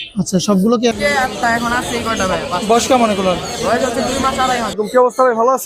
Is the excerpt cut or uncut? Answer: cut